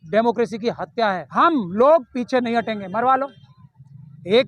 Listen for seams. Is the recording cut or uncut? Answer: cut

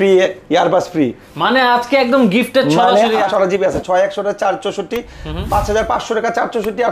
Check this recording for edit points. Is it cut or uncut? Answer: cut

